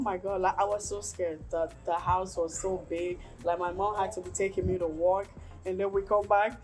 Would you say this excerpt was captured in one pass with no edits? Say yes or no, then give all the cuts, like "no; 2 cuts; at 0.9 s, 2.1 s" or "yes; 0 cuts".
yes; 0 cuts